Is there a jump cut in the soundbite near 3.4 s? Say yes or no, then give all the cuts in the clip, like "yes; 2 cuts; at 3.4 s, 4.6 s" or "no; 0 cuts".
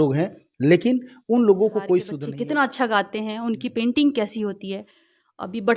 no; 1 cut; at 2.2 s